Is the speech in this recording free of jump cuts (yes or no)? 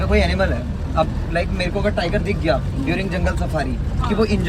yes